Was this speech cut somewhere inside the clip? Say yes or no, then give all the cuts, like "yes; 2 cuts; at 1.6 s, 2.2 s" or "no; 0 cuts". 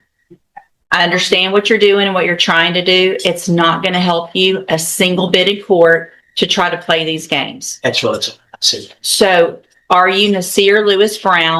no; 0 cuts